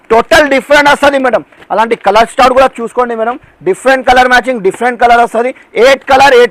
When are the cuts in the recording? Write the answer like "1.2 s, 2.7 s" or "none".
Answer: none